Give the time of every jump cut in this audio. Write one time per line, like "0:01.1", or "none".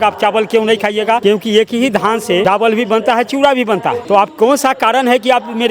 0:01.2
0:02.4
0:04.0